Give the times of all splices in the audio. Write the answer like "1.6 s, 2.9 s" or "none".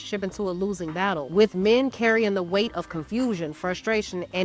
1.6 s